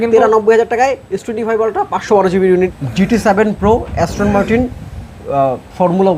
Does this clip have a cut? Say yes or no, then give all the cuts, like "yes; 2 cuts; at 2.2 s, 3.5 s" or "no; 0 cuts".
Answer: yes; 1 cut; at 2.7 s